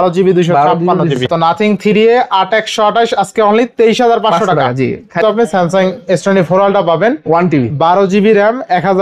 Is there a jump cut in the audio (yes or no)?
yes